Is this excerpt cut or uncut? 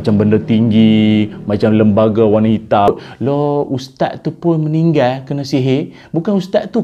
cut